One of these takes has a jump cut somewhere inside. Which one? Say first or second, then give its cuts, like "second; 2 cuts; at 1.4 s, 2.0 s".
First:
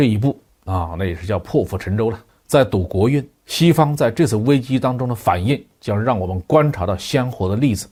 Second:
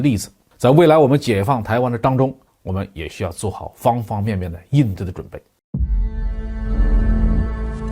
second; 1 cut; at 5.5 s